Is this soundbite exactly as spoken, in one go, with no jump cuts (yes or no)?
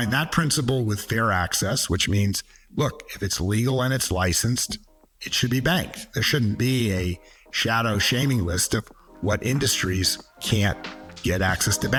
yes